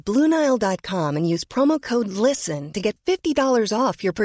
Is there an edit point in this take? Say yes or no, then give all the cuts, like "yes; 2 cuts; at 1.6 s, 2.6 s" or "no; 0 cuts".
no; 0 cuts